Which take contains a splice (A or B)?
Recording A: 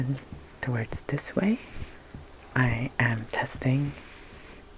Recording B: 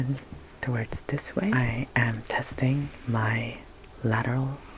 B